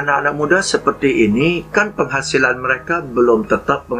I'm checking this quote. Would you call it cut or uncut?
uncut